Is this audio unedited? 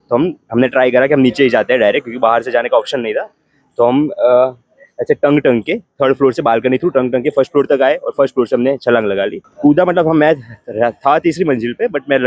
no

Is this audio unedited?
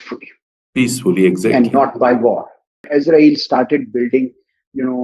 no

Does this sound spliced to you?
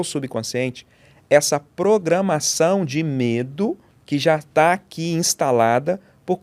yes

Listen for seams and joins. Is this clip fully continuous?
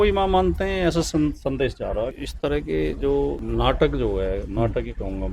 no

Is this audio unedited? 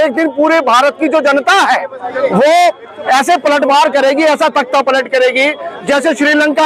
yes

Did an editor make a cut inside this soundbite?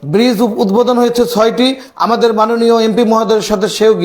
no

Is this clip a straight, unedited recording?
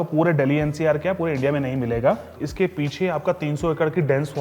no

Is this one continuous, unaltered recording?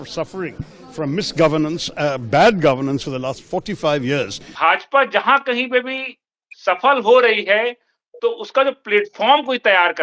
no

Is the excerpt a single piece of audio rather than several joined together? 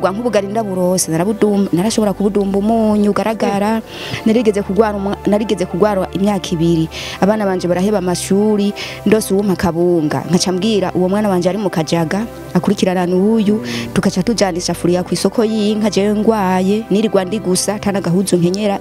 yes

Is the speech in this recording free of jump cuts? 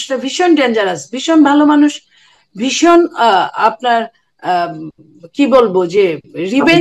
yes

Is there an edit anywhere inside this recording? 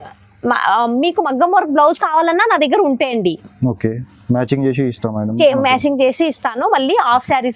no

